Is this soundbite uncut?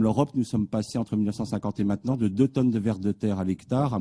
yes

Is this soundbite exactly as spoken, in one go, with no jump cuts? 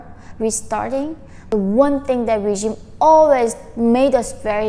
no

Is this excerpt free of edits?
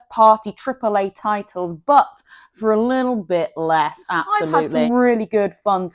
no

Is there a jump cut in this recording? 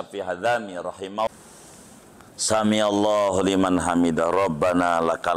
yes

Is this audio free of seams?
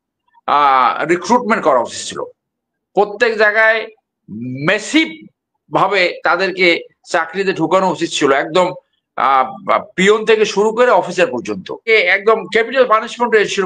no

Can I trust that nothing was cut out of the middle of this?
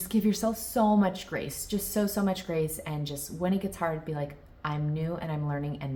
yes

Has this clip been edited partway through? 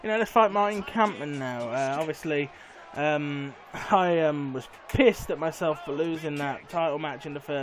no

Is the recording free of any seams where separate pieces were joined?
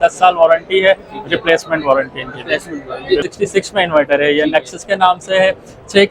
no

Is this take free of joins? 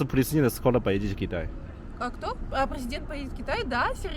yes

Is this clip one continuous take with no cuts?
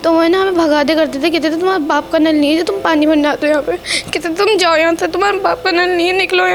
yes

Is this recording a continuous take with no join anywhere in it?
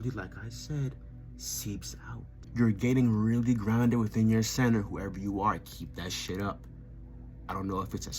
no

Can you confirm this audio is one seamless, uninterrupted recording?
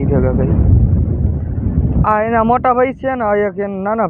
yes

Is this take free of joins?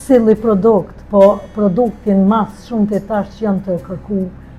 yes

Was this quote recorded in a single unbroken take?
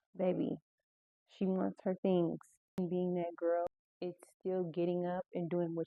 no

